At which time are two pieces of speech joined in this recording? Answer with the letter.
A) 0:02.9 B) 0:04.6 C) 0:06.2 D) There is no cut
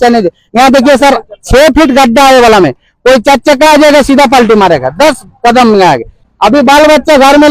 C